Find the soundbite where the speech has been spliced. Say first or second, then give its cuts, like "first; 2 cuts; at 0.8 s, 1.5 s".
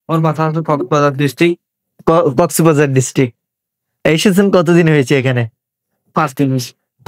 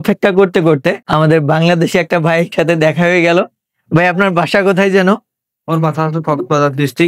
second; 1 cut; at 1.0 s